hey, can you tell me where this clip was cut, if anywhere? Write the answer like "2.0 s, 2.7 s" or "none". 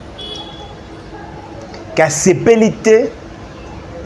none